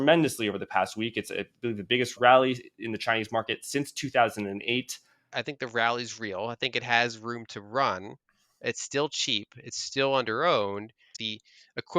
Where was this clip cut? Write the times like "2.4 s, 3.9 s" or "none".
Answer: 2.2 s, 5.3 s, 11.2 s